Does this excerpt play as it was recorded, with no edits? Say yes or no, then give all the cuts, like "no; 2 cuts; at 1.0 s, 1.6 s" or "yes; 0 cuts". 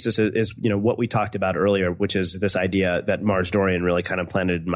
yes; 0 cuts